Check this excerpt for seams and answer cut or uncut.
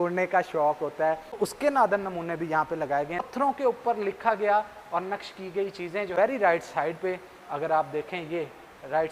cut